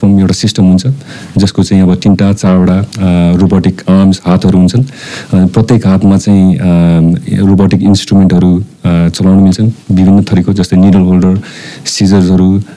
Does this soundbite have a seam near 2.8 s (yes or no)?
no